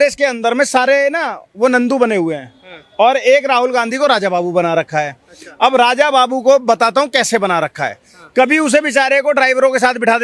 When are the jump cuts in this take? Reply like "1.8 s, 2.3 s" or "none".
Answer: none